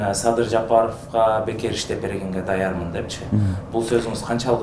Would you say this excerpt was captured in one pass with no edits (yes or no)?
yes